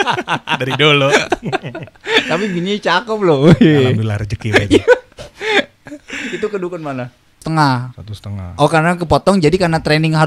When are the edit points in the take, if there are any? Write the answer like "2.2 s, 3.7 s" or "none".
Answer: 7.4 s